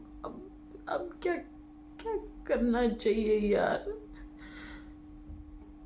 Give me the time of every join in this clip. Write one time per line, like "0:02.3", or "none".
none

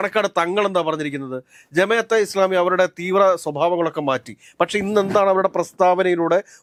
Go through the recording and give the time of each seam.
none

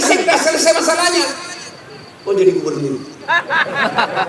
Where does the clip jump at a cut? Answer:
none

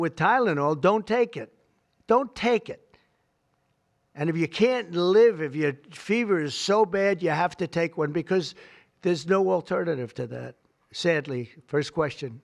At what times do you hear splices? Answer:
none

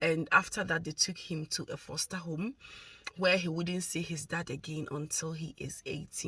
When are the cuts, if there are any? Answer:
0:02.6

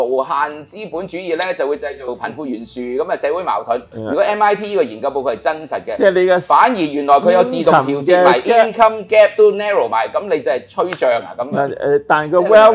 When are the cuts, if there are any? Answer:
0:04.0

